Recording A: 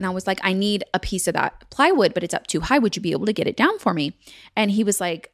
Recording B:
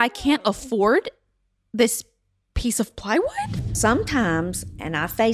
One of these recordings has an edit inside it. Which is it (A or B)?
B